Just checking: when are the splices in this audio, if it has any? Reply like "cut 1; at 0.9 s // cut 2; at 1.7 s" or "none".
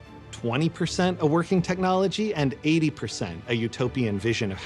none